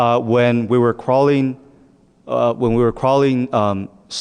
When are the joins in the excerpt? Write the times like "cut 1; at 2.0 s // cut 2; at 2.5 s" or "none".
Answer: cut 1; at 1.5 s